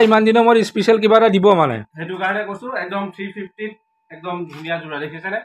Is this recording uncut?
yes; 0 cuts

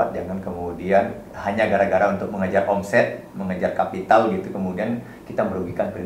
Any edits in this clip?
no; 0 cuts

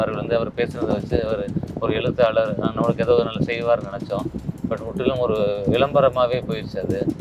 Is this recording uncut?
yes; 0 cuts

